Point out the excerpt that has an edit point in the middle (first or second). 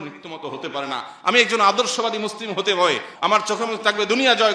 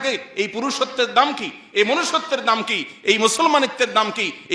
first